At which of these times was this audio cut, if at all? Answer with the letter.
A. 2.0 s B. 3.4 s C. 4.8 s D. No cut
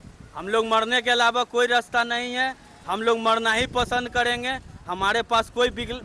D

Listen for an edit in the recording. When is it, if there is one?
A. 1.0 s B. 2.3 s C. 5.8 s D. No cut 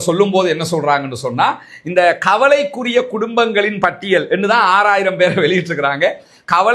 D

